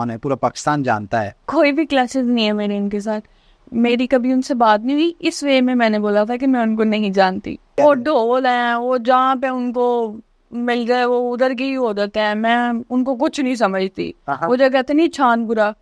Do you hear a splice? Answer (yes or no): yes